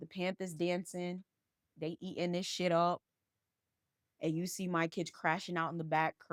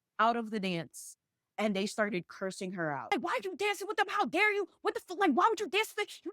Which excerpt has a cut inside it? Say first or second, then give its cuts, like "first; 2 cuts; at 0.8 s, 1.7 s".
second; 1 cut; at 3.1 s